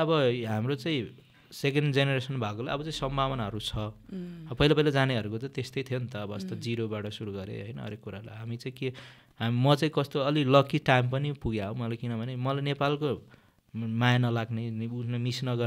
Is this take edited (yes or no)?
no